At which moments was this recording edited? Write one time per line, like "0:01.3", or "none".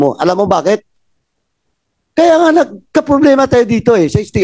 none